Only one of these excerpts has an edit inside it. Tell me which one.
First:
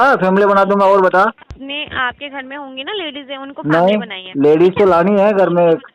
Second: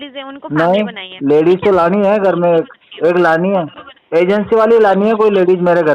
first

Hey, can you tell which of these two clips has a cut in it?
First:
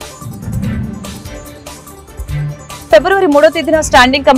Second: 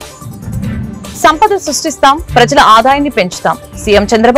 second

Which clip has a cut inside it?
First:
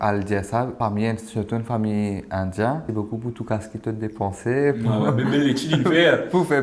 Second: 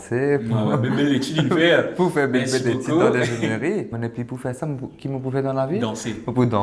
first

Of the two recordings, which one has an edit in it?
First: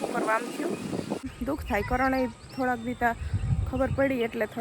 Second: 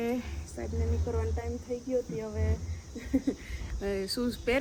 first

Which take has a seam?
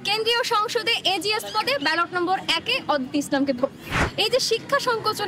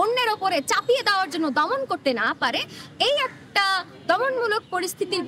first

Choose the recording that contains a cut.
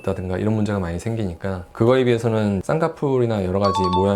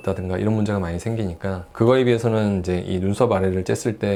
first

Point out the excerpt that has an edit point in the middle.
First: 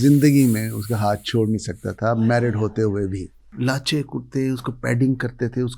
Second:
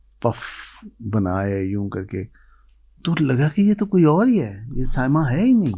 first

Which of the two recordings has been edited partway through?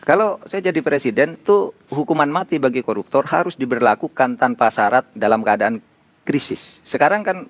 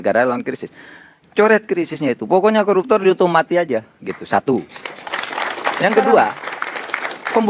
first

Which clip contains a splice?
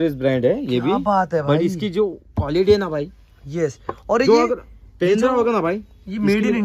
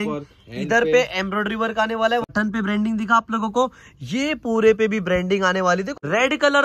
second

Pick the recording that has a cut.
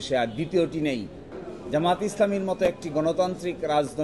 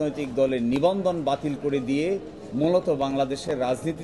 first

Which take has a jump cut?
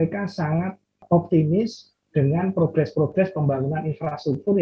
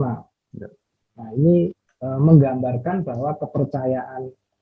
first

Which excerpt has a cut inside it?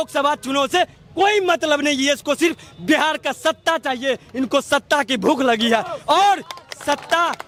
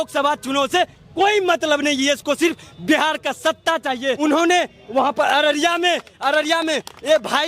second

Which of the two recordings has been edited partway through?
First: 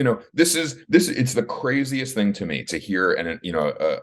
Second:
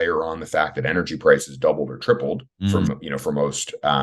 second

